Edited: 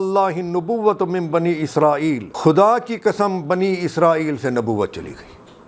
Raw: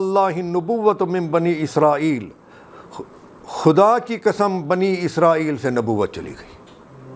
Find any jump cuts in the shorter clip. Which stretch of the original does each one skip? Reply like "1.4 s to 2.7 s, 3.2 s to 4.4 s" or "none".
2.3 s to 3.5 s